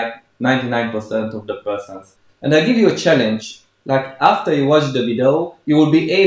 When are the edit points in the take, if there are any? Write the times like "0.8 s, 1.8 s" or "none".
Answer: 2.1 s